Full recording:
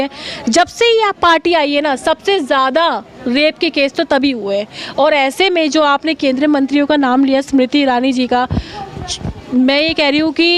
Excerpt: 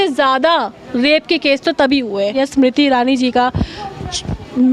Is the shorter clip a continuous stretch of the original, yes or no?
no